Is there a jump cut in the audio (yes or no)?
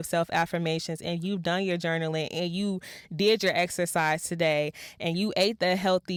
no